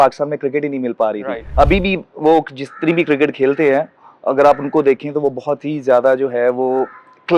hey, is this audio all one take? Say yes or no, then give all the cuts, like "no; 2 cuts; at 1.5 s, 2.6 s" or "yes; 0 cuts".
no; 1 cut; at 1.4 s